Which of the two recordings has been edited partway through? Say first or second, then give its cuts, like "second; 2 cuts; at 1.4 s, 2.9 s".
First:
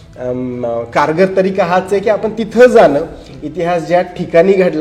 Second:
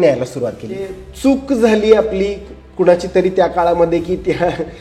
second; 1 cut; at 1.0 s